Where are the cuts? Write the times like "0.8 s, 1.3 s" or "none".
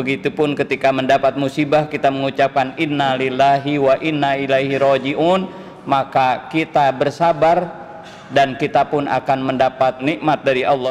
10.0 s